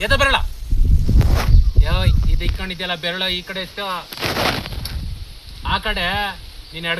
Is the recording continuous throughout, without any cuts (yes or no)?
yes